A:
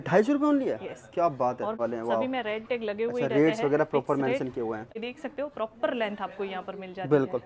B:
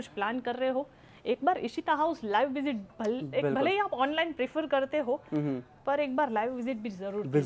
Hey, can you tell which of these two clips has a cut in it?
A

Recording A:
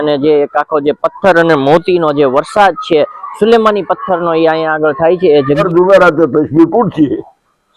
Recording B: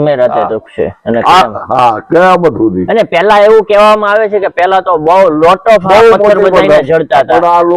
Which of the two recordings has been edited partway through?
A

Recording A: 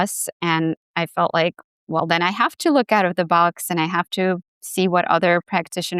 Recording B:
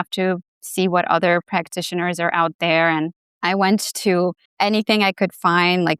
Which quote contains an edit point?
B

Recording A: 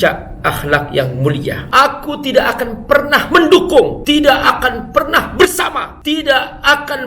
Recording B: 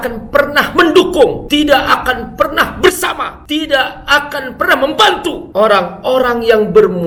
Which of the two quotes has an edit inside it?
A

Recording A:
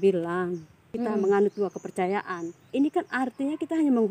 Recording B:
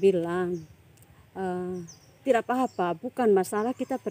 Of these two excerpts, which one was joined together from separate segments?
A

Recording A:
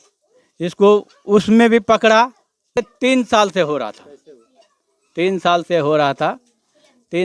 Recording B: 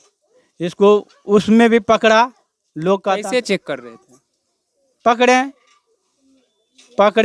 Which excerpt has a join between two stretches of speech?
A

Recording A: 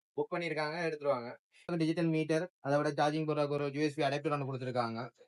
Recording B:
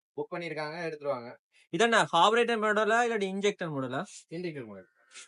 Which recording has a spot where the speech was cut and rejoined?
A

